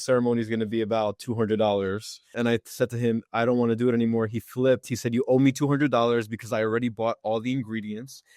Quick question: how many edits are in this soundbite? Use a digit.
1